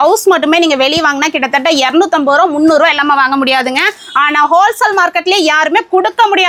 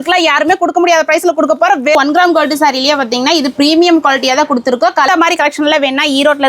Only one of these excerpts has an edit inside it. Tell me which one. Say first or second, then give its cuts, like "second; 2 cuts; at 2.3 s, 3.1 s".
second; 2 cuts; at 2.0 s, 5.1 s